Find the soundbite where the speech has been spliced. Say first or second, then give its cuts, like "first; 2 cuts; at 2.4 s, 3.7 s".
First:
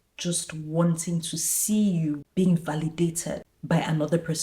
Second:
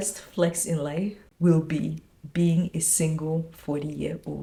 first; 2 cuts; at 2.2 s, 3.5 s